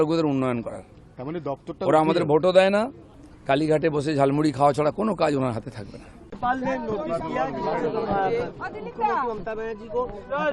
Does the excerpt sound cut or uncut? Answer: cut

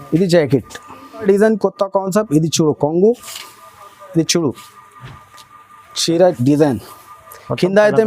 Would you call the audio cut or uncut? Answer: cut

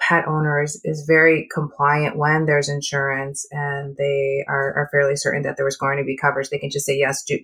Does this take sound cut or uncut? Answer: uncut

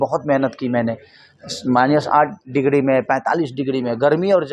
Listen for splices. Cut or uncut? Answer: uncut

